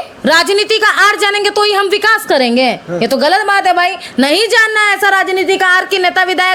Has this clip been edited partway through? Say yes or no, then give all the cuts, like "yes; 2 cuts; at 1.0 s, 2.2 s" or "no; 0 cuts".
no; 0 cuts